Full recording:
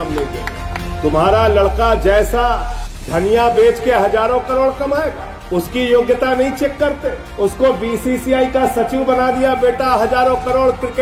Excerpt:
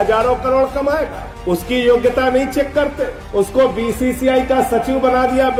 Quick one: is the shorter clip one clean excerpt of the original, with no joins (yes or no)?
yes